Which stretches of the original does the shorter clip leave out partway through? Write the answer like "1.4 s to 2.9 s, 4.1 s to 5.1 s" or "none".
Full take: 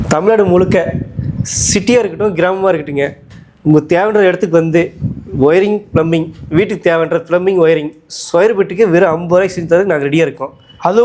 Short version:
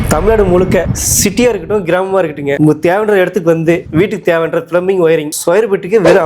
1.0 s to 1.5 s, 3.1 s to 3.6 s, 4.9 s to 6.4 s, 7.9 s to 8.2 s